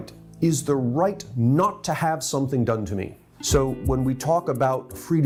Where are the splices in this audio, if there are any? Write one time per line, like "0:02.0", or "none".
none